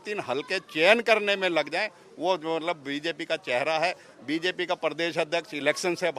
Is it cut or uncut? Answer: uncut